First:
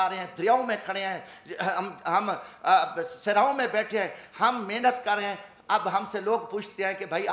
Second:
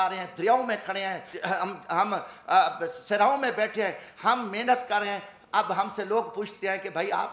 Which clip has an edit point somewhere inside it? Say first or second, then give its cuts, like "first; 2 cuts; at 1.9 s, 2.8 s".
second; 1 cut; at 1.3 s